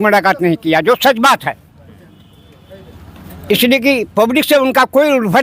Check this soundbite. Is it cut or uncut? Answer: uncut